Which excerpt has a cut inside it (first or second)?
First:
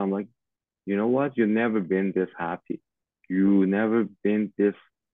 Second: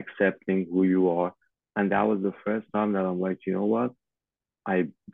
second